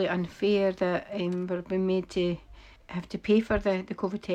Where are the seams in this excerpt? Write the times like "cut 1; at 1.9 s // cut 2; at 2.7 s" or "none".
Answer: none